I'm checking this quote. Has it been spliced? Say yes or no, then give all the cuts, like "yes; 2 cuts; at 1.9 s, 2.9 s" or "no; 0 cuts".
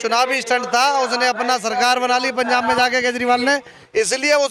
no; 0 cuts